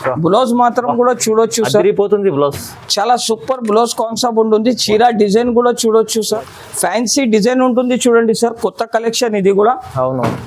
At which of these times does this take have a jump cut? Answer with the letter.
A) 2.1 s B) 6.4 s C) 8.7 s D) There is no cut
B